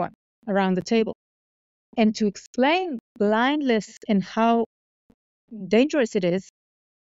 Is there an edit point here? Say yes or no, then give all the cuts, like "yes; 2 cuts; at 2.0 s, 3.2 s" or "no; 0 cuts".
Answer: no; 0 cuts